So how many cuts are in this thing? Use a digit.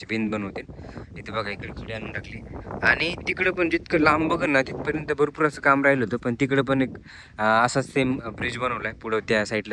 0